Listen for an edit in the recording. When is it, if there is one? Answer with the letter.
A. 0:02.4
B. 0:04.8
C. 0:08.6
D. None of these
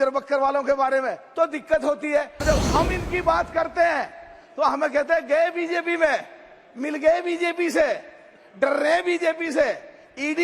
A